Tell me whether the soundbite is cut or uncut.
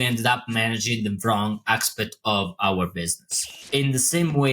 cut